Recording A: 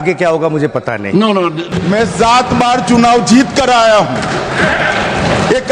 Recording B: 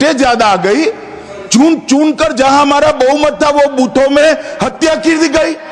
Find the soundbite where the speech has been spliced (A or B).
A